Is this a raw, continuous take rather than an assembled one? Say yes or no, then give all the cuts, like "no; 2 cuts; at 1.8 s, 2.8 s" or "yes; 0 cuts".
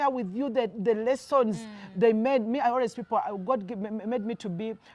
yes; 0 cuts